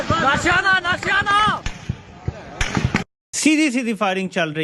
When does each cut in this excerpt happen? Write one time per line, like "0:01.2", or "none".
0:03.2